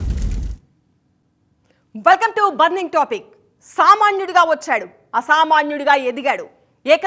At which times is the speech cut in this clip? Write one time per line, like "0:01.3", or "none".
0:01.3